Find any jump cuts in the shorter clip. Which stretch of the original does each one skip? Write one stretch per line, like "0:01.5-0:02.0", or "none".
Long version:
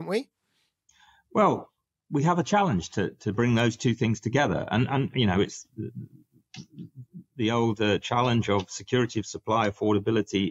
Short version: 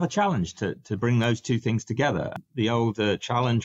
0:04.7-0:07.1

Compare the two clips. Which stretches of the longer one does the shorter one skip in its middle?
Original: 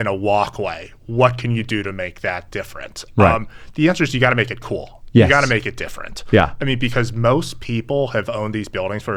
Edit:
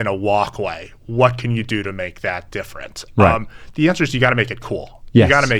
none

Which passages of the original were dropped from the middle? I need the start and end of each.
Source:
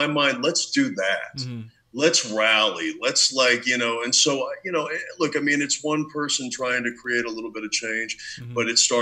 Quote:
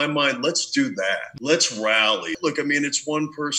0:01.3-0:01.8
0:02.8-0:05.1

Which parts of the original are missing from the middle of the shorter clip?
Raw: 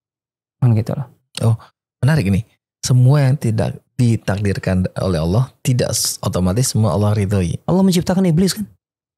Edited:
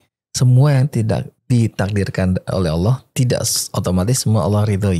none

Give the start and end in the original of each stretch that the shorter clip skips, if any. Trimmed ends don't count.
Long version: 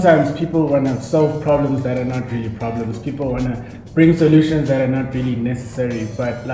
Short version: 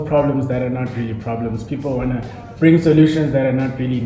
none

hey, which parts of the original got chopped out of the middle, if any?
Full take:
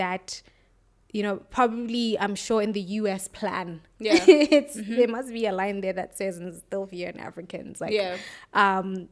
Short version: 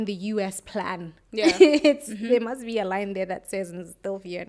none

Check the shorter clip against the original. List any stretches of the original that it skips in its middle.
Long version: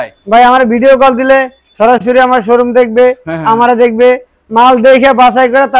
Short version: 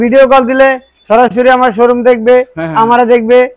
none

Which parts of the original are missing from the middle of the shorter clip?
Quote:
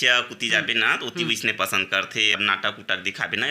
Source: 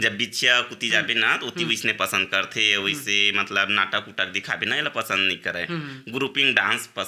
0:02.7-0:03.6

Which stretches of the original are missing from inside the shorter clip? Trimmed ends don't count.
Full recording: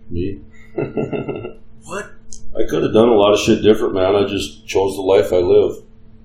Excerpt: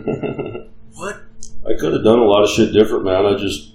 none

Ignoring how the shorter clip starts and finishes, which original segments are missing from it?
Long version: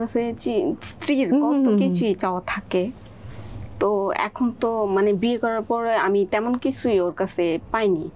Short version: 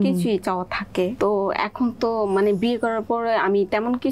0:02.9-0:03.7

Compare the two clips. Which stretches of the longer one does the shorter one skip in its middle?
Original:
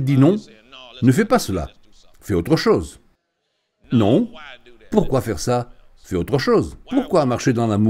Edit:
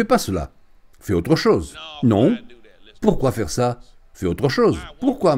0:03.0-0:03.7

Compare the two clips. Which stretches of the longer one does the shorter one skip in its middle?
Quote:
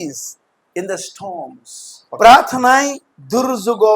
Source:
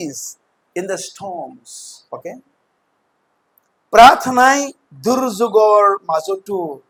0:02.2-0:03.9

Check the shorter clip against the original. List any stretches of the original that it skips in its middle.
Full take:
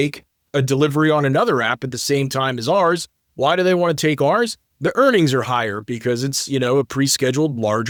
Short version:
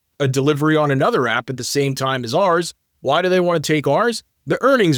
none

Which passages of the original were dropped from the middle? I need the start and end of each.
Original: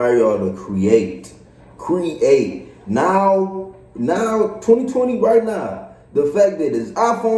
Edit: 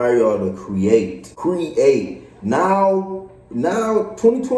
0:01.2-0:01.7

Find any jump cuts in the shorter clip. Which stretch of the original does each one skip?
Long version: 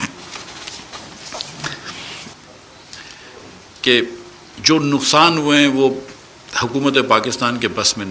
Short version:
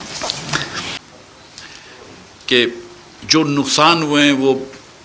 0:02.1-0:02.3

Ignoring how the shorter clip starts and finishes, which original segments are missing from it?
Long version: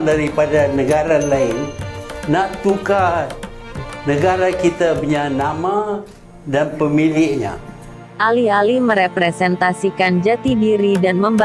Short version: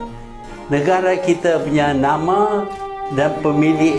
none

